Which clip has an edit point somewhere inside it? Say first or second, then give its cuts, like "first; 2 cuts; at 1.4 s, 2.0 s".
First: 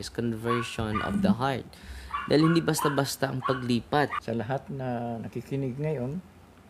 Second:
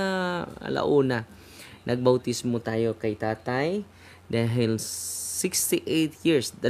first; 1 cut; at 4.2 s